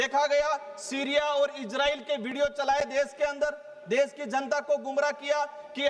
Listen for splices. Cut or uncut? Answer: uncut